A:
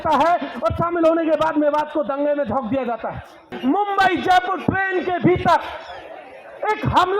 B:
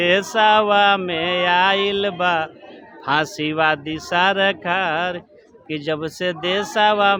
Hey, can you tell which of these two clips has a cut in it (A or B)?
A